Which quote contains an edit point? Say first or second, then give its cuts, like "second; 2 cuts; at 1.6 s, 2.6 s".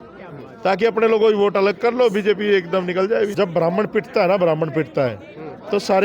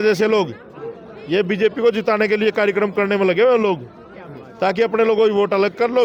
first; 1 cut; at 3.3 s